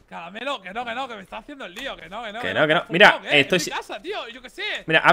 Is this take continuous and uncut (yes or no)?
yes